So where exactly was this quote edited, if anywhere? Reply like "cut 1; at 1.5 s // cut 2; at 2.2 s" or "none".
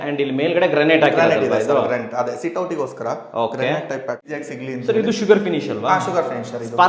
cut 1; at 4.3 s